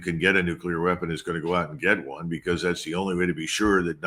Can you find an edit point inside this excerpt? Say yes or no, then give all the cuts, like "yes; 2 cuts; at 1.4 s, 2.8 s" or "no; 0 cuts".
no; 0 cuts